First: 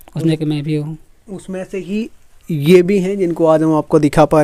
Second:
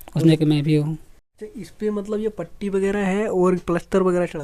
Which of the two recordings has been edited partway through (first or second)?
second